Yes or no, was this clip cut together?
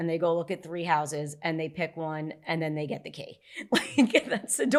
no